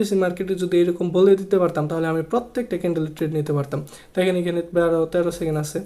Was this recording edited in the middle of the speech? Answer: no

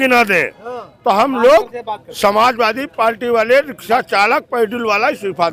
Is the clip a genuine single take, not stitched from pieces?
yes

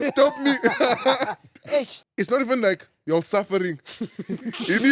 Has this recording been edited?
yes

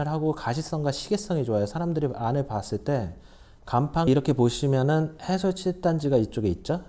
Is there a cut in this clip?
yes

